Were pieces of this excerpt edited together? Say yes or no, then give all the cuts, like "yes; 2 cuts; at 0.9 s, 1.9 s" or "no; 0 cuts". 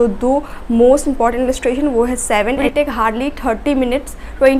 yes; 1 cut; at 2.6 s